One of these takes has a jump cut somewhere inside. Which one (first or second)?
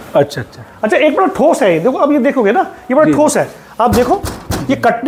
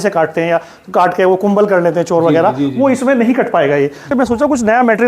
second